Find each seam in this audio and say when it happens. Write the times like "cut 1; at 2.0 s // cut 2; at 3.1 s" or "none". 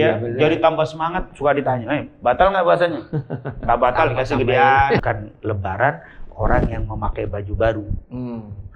cut 1; at 5.0 s